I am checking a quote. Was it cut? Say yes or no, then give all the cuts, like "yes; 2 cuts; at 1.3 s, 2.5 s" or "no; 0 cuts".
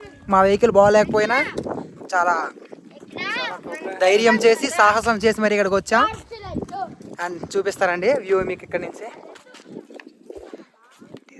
no; 0 cuts